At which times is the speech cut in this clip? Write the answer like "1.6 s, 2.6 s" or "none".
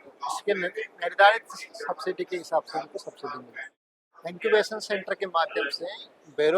3.8 s